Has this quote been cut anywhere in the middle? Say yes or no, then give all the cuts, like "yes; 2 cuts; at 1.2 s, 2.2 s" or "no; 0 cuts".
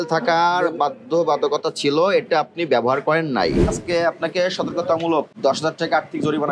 yes; 2 cuts; at 3.6 s, 5.3 s